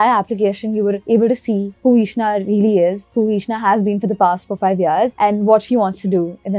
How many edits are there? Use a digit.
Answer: 0